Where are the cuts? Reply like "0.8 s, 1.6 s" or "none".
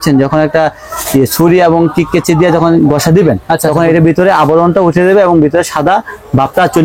none